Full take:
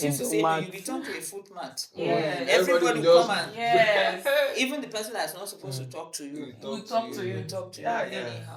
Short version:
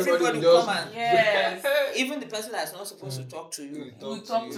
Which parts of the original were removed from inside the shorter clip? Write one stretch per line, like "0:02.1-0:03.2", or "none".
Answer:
none